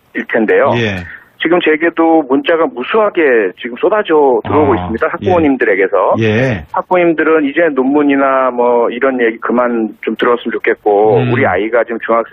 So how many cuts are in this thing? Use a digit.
1